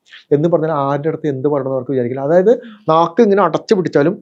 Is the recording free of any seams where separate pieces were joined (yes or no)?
yes